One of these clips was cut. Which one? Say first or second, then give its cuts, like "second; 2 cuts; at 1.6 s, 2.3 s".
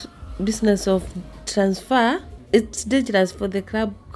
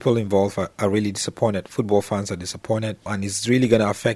second; 1 cut; at 3.1 s